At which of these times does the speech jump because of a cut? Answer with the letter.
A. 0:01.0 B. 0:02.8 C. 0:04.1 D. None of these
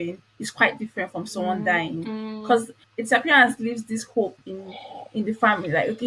B